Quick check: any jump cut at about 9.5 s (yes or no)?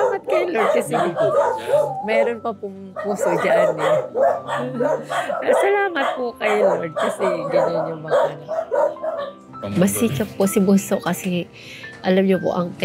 yes